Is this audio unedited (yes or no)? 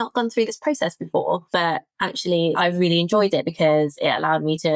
no